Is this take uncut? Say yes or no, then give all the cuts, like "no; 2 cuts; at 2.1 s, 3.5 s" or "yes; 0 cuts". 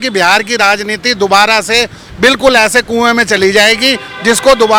yes; 0 cuts